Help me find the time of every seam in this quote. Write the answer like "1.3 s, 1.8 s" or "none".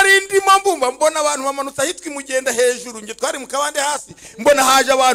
none